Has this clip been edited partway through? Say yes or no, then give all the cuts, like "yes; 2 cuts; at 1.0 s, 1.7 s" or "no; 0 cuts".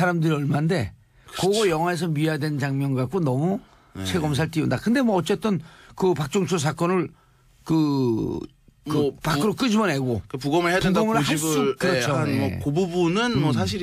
yes; 1 cut; at 8.3 s